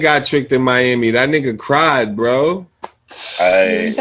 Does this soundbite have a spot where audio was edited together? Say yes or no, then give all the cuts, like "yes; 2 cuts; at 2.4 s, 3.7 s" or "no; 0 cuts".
no; 0 cuts